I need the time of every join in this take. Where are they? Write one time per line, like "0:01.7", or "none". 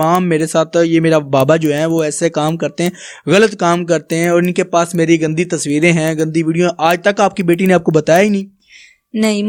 none